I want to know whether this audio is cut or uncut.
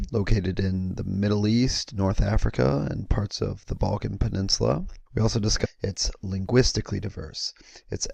uncut